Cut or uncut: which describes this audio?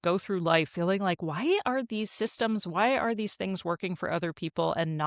uncut